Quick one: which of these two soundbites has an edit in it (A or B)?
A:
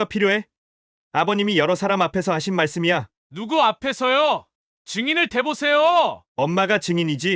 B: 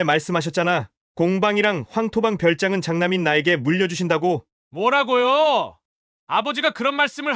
B